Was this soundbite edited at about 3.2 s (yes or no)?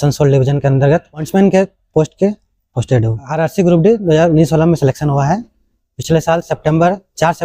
yes